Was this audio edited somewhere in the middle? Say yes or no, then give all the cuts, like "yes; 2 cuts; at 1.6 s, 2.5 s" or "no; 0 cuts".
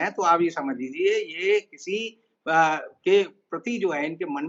no; 0 cuts